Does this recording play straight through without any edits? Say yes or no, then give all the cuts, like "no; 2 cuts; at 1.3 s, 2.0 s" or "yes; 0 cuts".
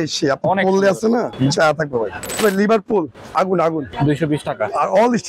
no; 3 cuts; at 1.3 s, 2.4 s, 3.9 s